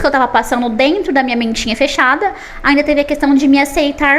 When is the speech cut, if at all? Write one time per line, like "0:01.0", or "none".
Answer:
none